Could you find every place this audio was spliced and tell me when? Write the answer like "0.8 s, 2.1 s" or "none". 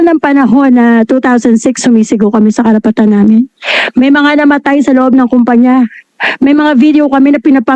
none

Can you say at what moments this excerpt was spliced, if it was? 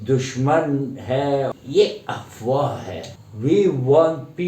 1.5 s, 3.0 s

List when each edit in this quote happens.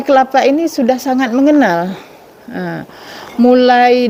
none

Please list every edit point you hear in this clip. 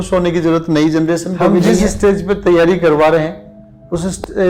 1.5 s

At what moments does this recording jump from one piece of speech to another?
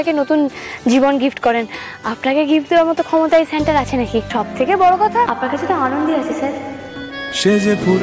4.3 s, 5.3 s

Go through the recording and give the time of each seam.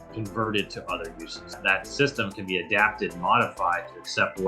1.5 s

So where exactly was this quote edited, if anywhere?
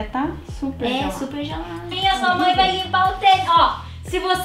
1.9 s

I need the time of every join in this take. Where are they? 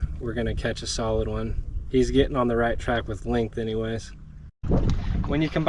4.6 s

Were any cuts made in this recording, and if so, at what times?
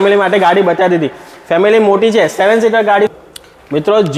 3.1 s

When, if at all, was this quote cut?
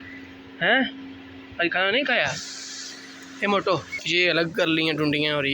4.0 s

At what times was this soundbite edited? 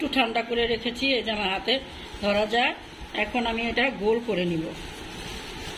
none

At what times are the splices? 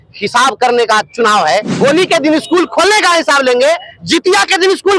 1.7 s

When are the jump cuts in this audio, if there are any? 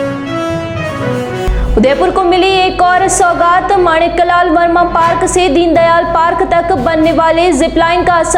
1.3 s

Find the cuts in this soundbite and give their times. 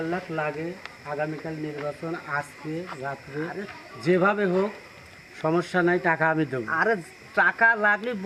none

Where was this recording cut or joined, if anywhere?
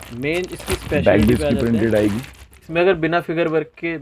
2.7 s

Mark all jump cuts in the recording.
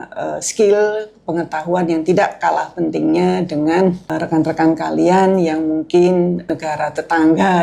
4.0 s, 6.5 s

